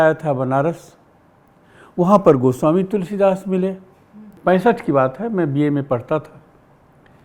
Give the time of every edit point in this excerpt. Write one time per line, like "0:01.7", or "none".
0:04.3